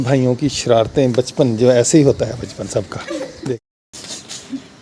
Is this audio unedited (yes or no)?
yes